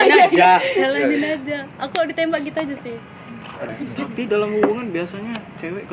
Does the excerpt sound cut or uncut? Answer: cut